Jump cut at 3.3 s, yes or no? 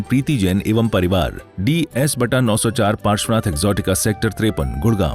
no